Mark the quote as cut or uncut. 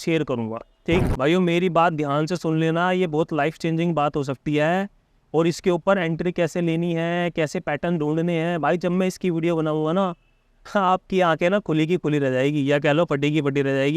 cut